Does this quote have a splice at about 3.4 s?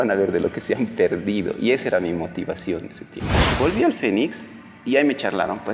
yes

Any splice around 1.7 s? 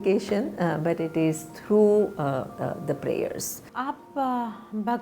no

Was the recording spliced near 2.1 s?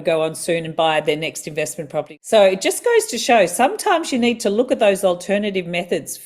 yes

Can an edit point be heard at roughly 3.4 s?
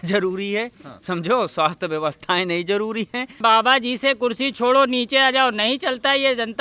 yes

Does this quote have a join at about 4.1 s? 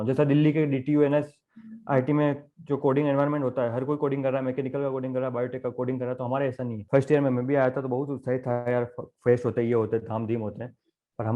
no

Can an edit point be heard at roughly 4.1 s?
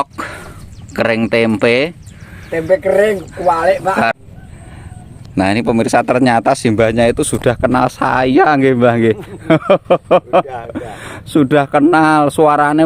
yes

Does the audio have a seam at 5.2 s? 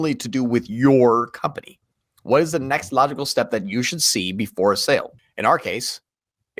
yes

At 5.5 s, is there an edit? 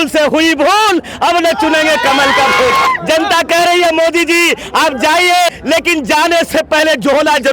yes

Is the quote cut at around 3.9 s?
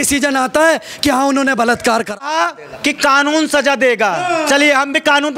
no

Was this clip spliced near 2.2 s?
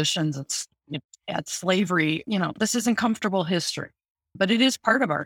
yes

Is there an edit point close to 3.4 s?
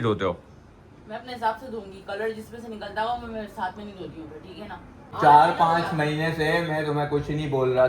no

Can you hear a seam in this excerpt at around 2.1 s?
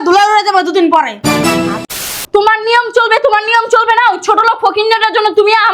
yes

